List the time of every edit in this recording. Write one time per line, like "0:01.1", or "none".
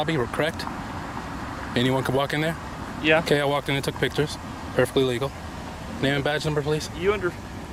none

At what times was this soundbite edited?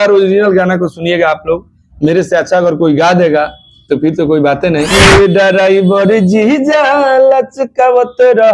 0:04.9

